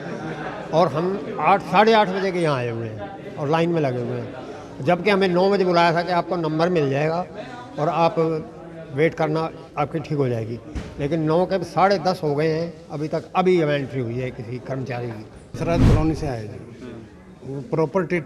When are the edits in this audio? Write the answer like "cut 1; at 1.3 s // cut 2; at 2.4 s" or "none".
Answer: cut 1; at 15.6 s